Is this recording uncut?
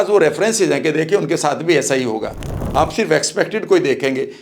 no; 1 cut; at 2.5 s

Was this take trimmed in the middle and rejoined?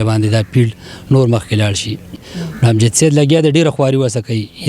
yes; 1 cut; at 2.2 s

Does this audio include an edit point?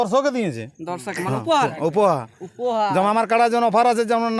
no; 0 cuts

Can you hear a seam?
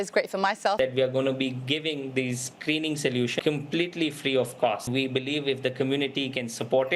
yes; 3 cuts; at 0.8 s, 3.4 s, 4.9 s

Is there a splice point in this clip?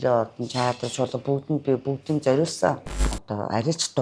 yes; 1 cut; at 2.9 s

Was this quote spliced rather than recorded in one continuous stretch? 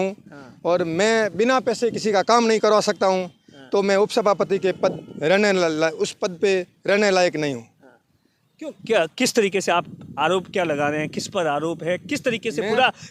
no; 0 cuts

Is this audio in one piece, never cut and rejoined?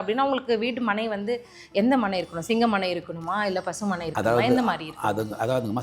yes; 0 cuts

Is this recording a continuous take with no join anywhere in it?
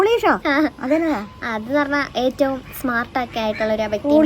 yes; 0 cuts

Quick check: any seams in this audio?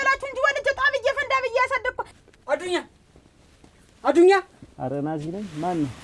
yes; 1 cut; at 2.1 s

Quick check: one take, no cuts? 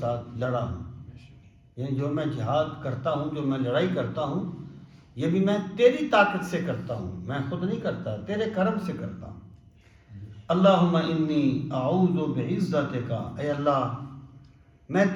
yes; 0 cuts

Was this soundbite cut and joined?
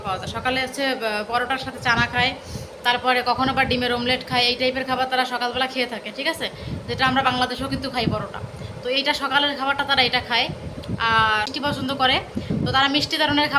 yes; 1 cut; at 11.5 s

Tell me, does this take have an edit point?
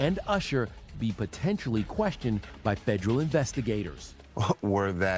yes; 1 cut; at 4.1 s

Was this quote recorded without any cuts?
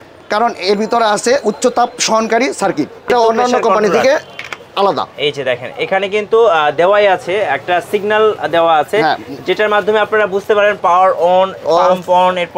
no; 1 cut; at 3.1 s

